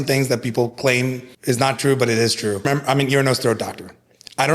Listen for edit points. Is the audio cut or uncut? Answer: cut